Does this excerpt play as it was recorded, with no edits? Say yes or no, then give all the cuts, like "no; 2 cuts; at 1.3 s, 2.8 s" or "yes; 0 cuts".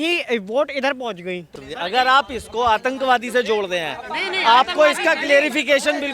no; 1 cut; at 1.6 s